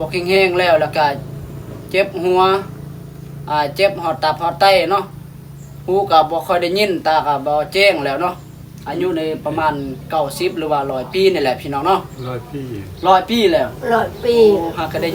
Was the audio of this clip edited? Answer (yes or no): no